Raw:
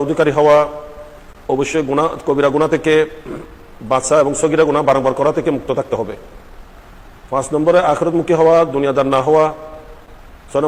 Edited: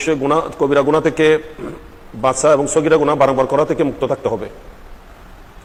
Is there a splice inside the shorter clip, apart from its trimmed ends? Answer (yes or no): no